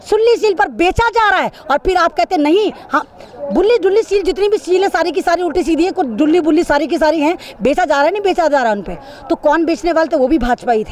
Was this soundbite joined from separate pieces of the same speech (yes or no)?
no